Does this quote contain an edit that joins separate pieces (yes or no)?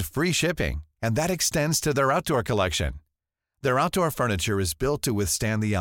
no